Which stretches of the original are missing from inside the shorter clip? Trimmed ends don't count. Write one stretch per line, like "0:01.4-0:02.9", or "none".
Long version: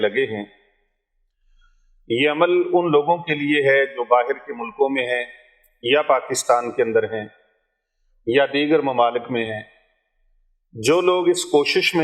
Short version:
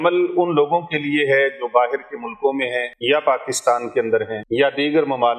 0:05.3-0:05.7
0:07.2-0:08.1

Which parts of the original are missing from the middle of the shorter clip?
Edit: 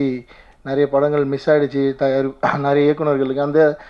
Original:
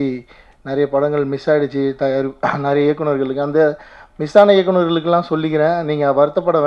none

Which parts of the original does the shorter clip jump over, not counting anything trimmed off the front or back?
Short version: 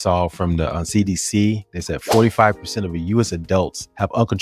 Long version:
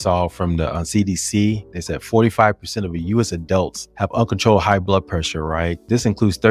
none

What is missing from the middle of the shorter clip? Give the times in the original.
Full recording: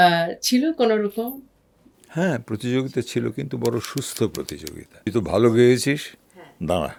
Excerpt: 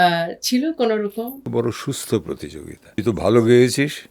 0:01.4-0:03.5

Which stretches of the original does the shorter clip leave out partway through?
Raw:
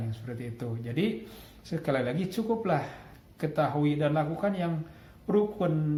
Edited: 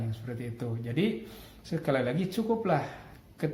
none

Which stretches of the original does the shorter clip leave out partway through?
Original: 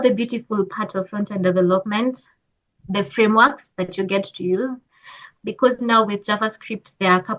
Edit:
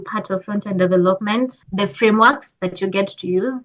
0:02.3-0:02.8

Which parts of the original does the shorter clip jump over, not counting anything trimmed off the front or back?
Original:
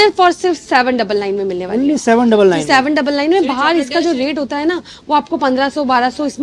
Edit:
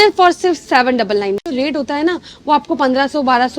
0:01.5-0:04.1

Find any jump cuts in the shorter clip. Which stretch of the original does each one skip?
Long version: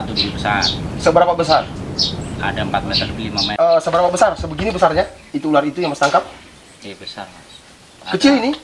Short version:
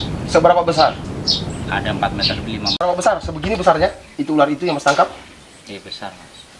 0:03.5-0:03.9

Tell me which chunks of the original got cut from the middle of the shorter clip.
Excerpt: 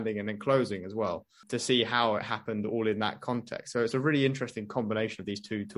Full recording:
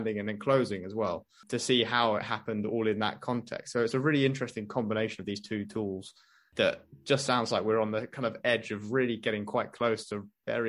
none

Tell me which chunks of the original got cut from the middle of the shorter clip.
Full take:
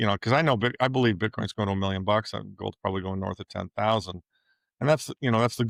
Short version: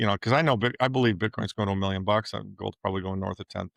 none

